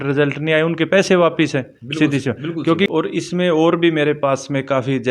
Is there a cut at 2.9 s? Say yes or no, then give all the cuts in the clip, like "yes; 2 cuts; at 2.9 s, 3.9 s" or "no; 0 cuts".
yes; 1 cut; at 2.9 s